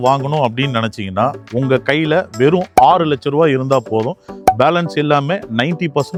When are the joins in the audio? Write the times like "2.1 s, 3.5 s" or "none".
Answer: none